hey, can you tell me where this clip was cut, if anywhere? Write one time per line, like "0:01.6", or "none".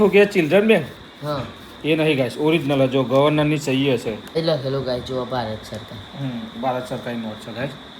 0:04.4

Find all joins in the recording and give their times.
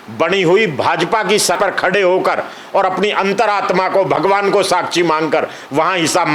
0:01.6

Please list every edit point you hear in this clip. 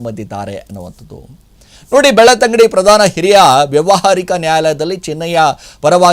none

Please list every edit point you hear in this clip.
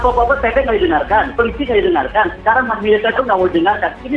0:01.3

